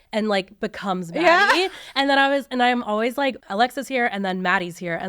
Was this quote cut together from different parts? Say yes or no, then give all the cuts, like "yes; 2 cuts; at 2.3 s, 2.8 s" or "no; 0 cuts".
yes; 1 cut; at 3.4 s